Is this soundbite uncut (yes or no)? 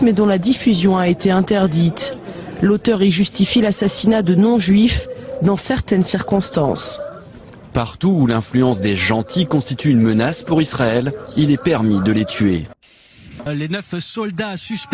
no